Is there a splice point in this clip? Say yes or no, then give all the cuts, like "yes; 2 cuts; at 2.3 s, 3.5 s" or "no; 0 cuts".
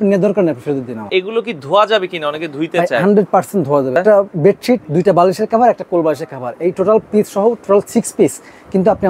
yes; 2 cuts; at 1.1 s, 4.0 s